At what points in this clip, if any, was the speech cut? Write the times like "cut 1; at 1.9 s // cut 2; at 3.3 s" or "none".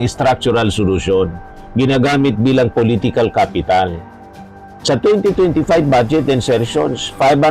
none